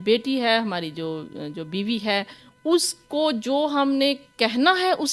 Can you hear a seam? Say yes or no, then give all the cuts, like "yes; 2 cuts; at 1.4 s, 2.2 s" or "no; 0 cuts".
no; 0 cuts